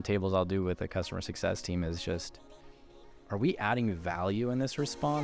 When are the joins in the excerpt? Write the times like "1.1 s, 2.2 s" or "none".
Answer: none

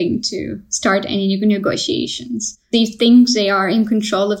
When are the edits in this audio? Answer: 2.7 s

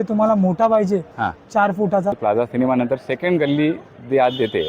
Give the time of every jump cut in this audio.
2.2 s

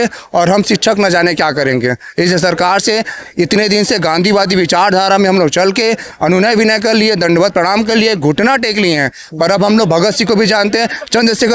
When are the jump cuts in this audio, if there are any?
none

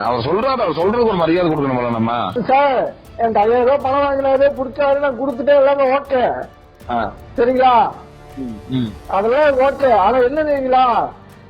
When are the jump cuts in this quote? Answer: 2.4 s

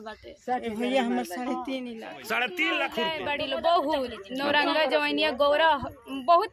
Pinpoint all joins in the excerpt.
2.9 s

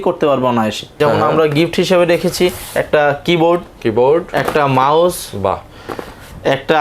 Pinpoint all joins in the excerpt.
1.0 s

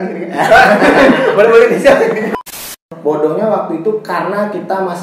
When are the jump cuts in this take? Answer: 2.3 s

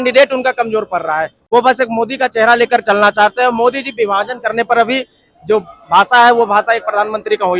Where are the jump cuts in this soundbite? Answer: none

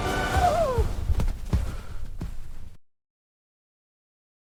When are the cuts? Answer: none

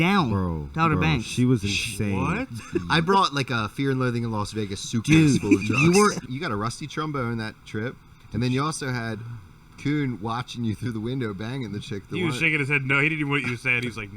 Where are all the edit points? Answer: 2.5 s, 6.3 s

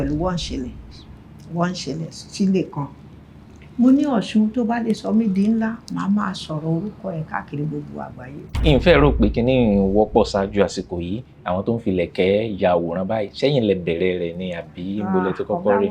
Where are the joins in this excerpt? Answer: 8.5 s

